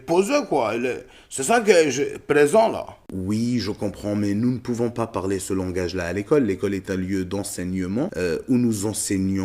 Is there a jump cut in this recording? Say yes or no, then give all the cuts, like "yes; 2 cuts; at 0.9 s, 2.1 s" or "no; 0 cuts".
yes; 1 cut; at 8.1 s